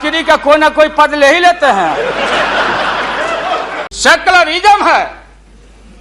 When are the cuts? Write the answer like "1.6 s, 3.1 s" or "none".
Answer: 3.8 s